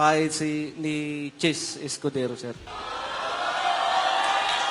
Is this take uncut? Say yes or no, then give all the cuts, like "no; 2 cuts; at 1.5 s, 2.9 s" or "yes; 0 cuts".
no; 1 cut; at 2.7 s